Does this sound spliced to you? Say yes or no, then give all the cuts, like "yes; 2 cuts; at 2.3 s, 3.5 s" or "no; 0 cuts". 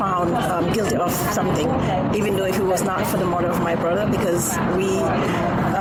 no; 0 cuts